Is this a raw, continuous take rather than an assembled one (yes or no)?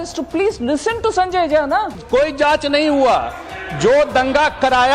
no